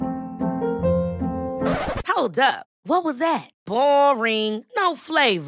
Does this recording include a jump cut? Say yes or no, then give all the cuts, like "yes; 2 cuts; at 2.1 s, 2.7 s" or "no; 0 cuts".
no; 0 cuts